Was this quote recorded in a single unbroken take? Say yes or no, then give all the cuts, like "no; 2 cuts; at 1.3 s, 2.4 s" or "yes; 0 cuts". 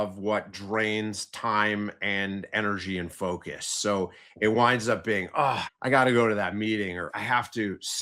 no; 2 cuts; at 5.7 s, 7.1 s